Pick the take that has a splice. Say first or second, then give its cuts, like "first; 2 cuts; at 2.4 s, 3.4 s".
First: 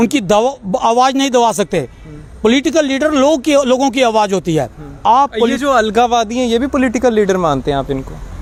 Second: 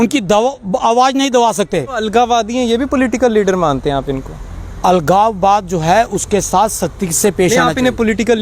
second; 1 cut; at 2.0 s